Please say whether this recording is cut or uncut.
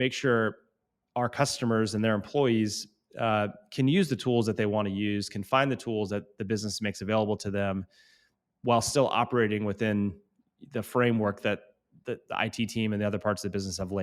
uncut